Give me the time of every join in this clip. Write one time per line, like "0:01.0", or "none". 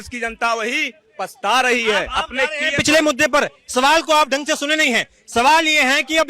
none